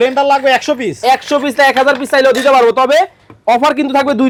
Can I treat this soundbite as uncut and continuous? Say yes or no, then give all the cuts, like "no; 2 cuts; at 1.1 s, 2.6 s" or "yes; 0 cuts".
yes; 0 cuts